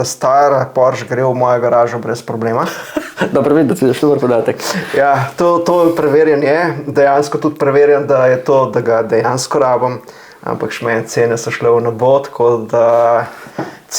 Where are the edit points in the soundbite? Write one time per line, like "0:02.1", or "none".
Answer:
none